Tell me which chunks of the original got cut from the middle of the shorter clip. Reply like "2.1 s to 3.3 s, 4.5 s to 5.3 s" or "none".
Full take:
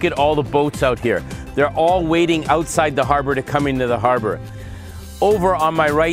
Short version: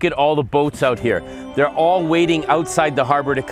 none